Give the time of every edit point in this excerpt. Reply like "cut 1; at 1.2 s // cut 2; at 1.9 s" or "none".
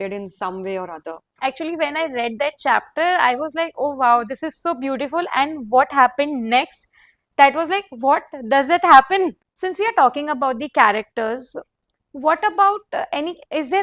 cut 1; at 1.2 s // cut 2; at 9.5 s

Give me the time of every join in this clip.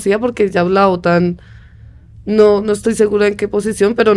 none

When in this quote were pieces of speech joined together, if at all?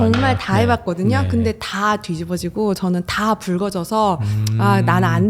none

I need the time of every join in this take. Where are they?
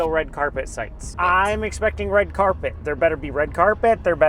cut 1; at 1.0 s

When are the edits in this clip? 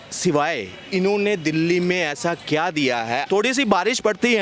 cut 1; at 3.2 s

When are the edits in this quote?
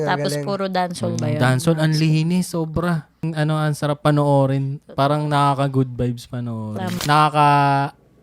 cut 1; at 3.3 s // cut 2; at 7.0 s

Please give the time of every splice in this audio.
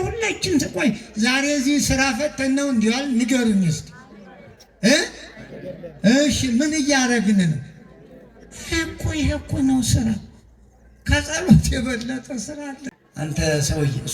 cut 1; at 12.5 s

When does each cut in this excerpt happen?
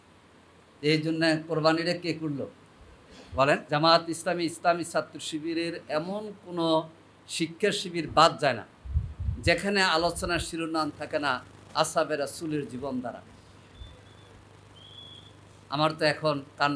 cut 1; at 3.6 s

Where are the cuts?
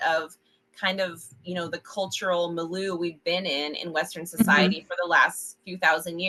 none

